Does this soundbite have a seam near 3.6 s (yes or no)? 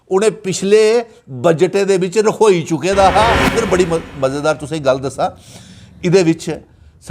yes